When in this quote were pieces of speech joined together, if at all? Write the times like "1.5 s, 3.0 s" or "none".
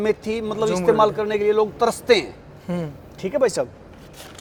none